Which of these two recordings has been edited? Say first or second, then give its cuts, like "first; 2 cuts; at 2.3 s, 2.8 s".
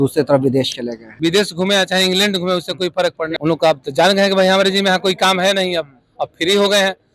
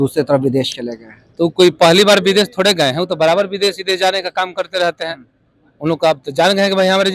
first; 2 cuts; at 1.1 s, 3.3 s